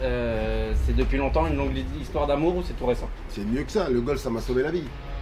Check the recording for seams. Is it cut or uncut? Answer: uncut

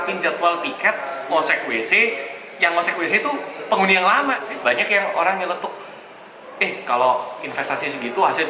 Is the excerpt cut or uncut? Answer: cut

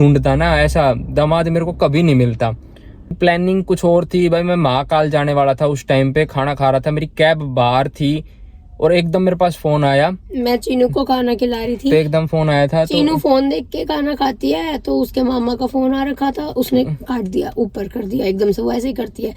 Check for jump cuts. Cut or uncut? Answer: cut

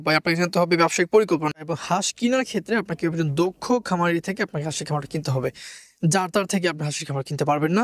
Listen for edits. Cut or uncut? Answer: cut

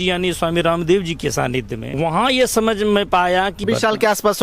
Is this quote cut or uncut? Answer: cut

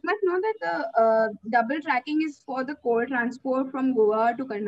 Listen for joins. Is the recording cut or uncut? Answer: uncut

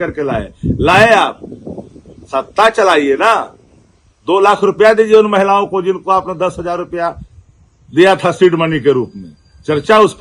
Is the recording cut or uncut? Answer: uncut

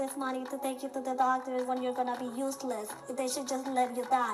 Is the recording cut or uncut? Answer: uncut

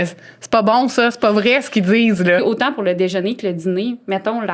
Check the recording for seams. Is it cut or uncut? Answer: cut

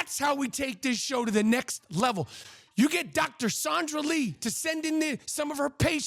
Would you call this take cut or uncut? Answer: uncut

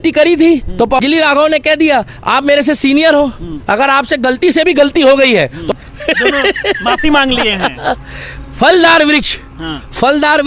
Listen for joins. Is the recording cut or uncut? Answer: cut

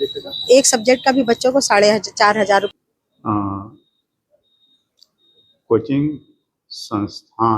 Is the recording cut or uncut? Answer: cut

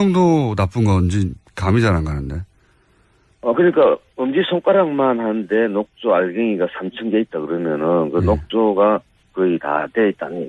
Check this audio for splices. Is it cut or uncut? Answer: uncut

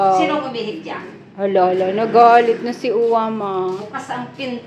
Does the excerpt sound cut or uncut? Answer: uncut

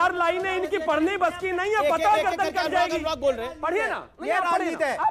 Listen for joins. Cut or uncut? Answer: uncut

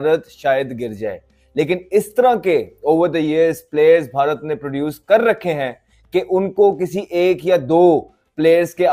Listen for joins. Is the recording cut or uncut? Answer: uncut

